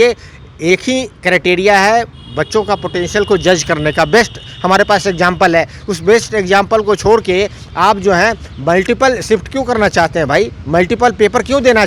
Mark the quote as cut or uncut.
uncut